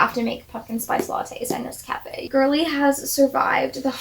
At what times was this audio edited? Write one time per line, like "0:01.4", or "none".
0:02.3